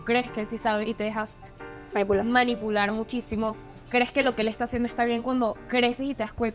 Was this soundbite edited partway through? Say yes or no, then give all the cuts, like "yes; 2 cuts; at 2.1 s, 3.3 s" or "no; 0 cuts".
no; 0 cuts